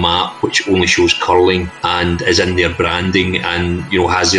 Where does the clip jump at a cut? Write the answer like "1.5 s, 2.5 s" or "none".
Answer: 1.8 s

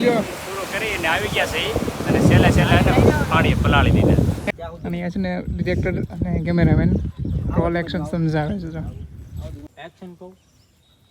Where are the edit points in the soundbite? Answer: 4.4 s, 9.7 s

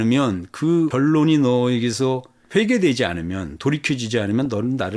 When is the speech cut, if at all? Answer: none

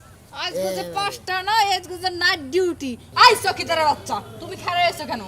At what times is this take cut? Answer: 3.0 s

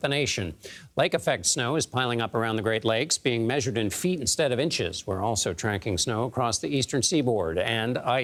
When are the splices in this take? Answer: none

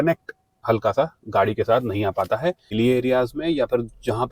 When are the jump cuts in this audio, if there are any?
2.6 s

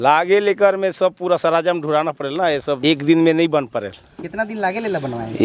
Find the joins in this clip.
2.8 s

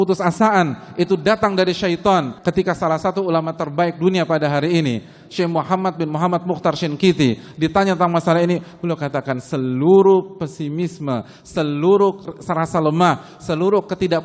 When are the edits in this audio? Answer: 2.3 s

